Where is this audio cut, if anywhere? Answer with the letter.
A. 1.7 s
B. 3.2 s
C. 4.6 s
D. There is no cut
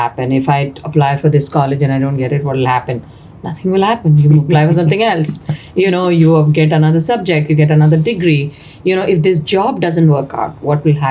D